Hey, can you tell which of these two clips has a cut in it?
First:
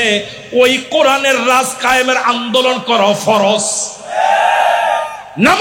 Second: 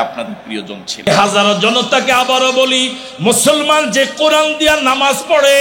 second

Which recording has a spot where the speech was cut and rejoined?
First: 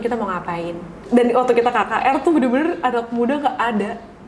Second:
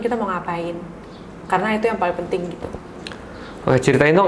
first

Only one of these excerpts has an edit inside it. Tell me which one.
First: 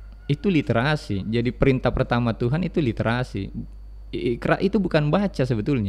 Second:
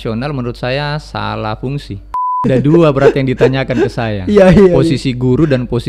second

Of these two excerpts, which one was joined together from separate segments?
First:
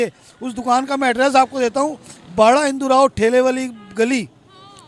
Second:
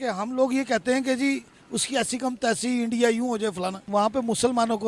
second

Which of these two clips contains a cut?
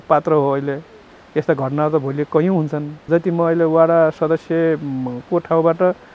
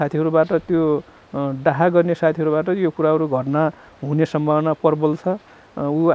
first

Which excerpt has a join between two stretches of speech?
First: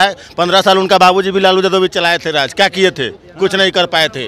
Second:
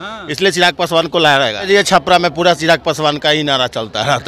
second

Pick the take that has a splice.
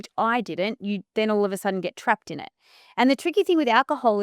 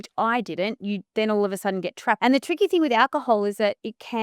second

